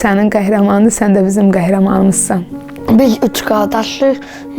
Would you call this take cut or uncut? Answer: cut